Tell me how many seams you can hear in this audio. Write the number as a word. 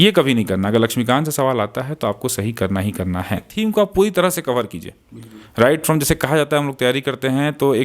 one